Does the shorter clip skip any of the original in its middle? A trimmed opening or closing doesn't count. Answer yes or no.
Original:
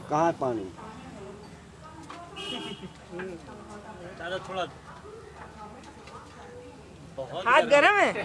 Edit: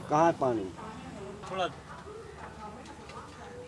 yes